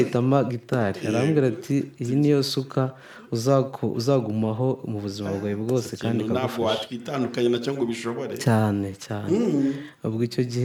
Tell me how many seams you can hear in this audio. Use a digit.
0